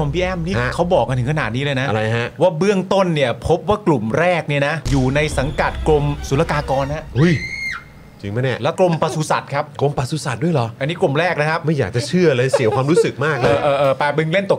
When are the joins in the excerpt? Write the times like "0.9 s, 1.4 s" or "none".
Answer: none